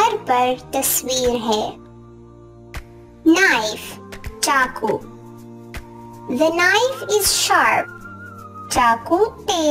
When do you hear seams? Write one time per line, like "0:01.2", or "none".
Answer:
0:01.7
0:03.2